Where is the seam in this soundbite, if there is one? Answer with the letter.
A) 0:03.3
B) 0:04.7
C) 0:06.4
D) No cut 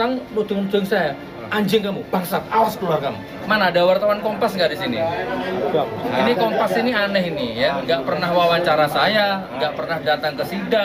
A